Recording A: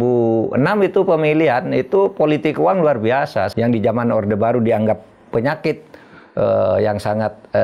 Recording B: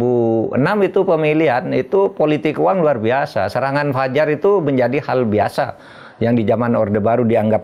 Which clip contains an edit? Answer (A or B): A